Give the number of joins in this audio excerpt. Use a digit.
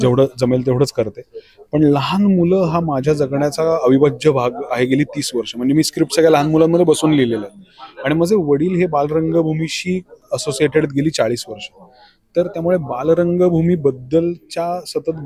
0